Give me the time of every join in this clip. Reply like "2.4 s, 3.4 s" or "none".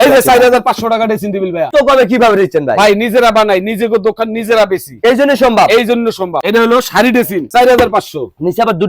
1.7 s, 6.4 s, 7.5 s